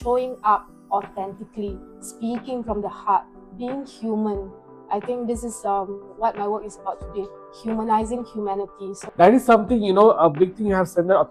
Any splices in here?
no; 0 cuts

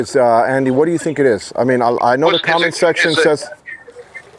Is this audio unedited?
yes; 0 cuts

